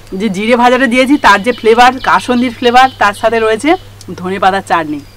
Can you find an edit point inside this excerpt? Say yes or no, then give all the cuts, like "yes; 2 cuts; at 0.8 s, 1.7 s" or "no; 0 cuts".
no; 0 cuts